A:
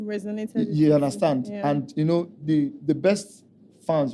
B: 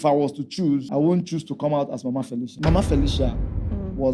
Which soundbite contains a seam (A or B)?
B